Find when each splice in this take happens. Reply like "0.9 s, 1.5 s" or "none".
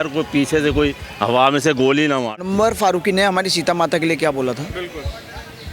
2.4 s